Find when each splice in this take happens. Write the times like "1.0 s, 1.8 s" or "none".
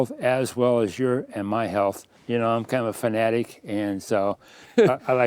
2.1 s